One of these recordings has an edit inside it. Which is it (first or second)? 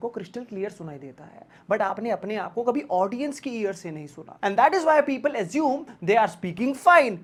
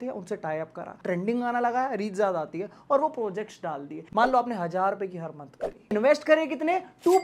second